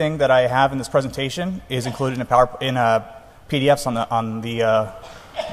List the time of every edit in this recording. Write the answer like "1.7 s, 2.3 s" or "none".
2.1 s